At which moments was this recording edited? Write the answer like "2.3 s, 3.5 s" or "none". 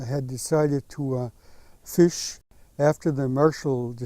2.4 s